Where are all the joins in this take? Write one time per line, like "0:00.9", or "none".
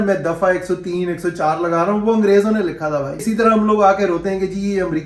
0:03.2